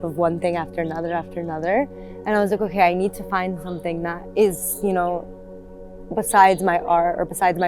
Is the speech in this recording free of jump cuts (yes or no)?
no